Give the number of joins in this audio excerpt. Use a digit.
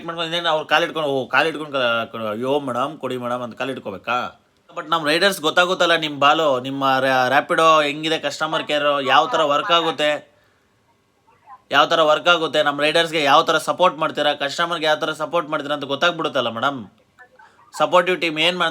1